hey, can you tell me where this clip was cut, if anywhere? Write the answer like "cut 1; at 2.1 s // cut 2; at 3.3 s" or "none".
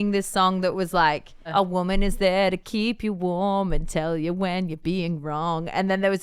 cut 1; at 1.5 s